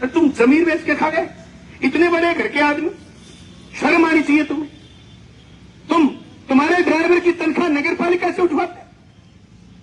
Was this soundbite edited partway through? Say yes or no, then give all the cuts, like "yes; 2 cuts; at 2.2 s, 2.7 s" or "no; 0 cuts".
no; 0 cuts